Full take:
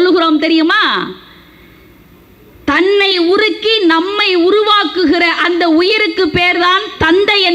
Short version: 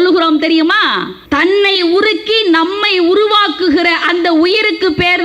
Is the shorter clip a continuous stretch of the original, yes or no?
no